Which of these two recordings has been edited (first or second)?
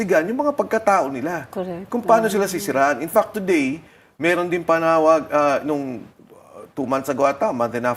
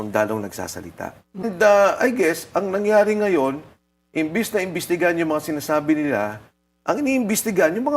second